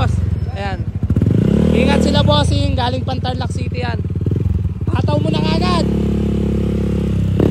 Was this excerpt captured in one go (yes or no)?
yes